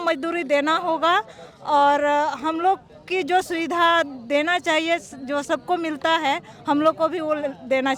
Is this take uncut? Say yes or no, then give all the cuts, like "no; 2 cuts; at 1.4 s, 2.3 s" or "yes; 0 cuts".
yes; 0 cuts